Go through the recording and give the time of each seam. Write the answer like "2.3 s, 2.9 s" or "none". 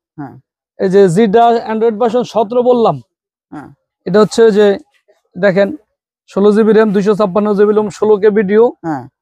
none